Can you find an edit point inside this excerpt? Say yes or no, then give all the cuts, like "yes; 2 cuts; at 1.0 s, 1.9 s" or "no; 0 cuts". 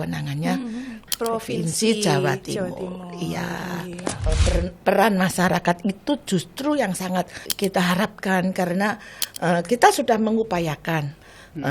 yes; 3 cuts; at 1.1 s, 4.3 s, 7.4 s